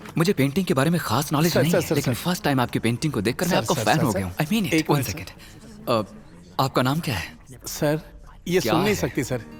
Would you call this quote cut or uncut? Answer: uncut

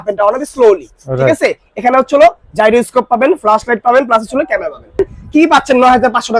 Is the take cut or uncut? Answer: cut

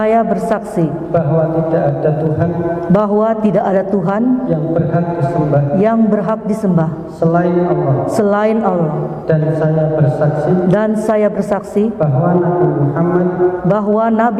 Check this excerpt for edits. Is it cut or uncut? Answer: uncut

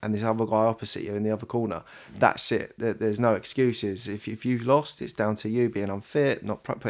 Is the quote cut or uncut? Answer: uncut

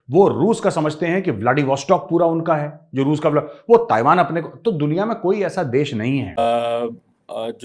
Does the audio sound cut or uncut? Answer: cut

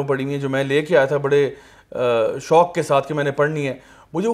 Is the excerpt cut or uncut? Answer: uncut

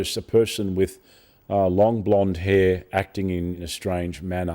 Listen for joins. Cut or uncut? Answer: cut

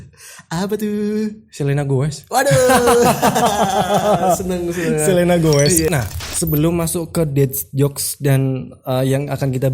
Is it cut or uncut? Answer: cut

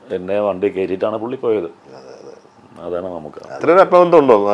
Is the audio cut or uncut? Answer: uncut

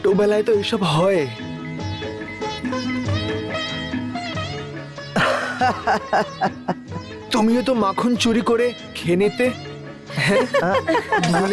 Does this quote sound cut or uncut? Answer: uncut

